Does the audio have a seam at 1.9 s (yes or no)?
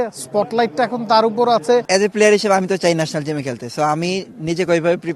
yes